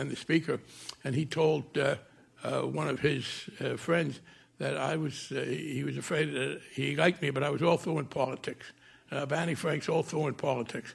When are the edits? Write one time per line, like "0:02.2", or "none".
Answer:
none